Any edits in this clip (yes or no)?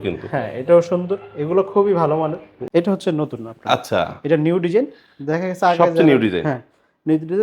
yes